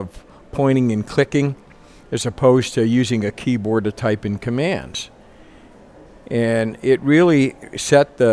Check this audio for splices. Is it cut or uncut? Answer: uncut